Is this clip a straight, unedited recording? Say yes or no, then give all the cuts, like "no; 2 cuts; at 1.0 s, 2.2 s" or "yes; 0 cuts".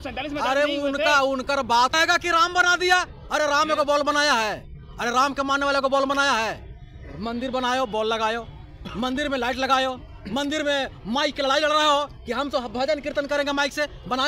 no; 1 cut; at 1.9 s